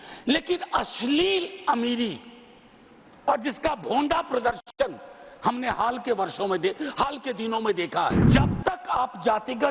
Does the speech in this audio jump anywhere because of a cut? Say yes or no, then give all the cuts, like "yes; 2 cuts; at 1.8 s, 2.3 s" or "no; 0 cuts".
yes; 1 cut; at 8.3 s